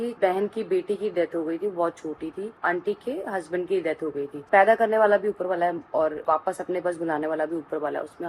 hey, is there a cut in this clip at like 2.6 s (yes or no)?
yes